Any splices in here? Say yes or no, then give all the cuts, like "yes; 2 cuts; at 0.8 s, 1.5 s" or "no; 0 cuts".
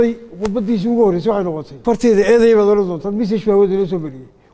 yes; 1 cut; at 1.7 s